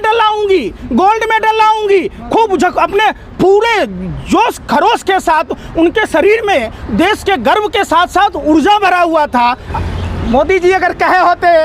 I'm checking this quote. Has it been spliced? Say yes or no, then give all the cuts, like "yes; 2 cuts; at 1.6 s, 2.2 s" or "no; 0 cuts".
yes; 1 cut; at 9.7 s